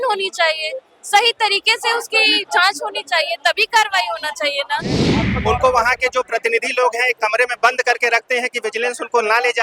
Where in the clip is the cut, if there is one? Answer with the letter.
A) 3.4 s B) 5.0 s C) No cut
B